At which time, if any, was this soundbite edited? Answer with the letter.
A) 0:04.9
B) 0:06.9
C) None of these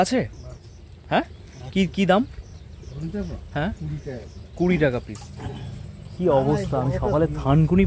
A